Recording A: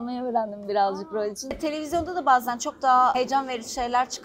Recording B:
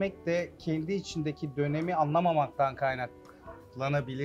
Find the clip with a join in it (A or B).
A